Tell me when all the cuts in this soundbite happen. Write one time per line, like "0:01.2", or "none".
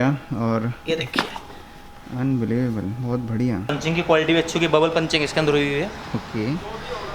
0:03.7